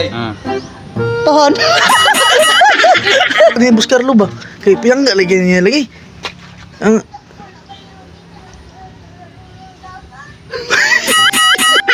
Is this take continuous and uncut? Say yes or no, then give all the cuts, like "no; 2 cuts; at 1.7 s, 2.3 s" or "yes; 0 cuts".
no; 1 cut; at 3.6 s